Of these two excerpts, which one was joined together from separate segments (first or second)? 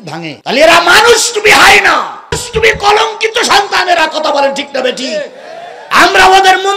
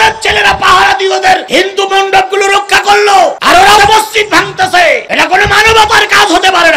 second